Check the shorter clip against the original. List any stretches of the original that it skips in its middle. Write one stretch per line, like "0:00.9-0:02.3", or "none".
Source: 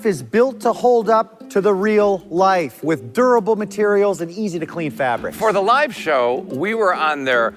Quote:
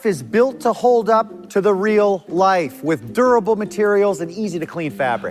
none